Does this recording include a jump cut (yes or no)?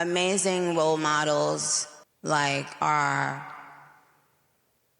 yes